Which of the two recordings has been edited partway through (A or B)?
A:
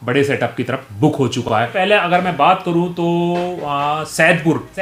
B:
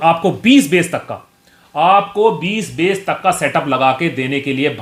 A